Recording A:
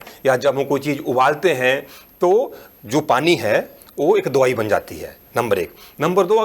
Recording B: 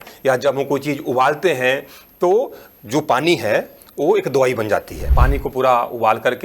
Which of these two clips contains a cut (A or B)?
B